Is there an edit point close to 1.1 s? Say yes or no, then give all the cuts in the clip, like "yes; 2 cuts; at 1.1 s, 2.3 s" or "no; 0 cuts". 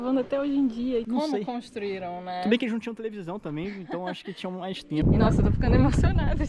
yes; 2 cuts; at 1.1 s, 5.0 s